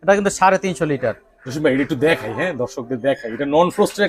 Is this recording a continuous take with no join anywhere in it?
yes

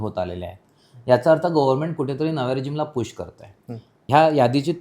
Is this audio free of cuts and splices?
no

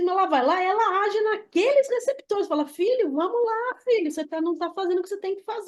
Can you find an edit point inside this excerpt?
no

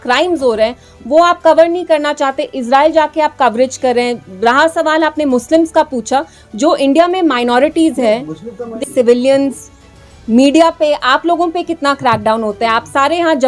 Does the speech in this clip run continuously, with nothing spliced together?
yes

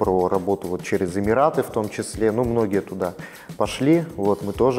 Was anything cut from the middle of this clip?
no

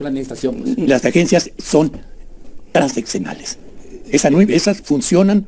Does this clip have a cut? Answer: no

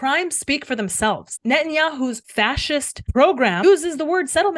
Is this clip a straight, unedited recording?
no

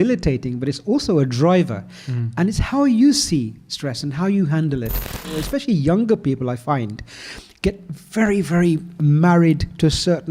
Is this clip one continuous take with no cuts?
no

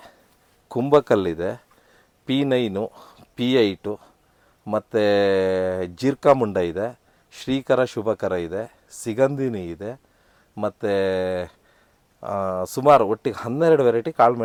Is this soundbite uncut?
yes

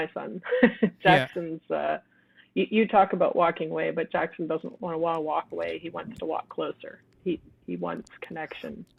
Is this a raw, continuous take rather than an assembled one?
yes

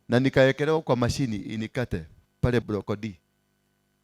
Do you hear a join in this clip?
yes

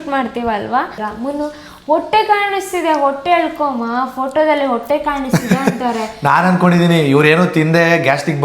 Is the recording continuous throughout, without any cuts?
no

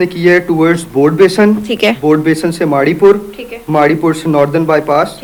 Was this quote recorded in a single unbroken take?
yes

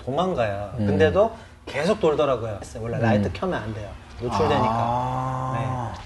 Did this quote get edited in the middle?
yes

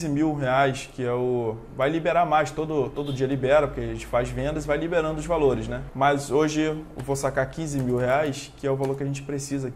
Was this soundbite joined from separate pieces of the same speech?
yes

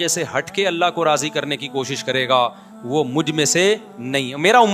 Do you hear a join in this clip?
no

